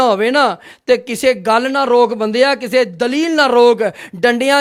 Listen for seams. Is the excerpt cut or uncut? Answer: uncut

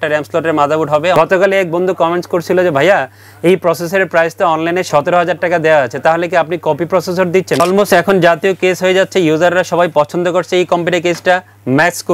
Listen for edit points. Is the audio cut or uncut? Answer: cut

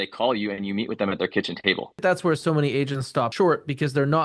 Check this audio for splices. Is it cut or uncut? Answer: cut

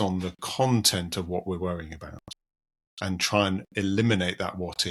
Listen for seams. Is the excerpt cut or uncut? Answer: uncut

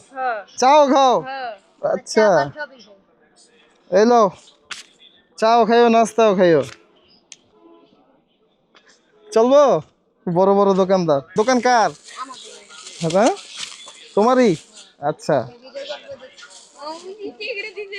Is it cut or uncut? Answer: cut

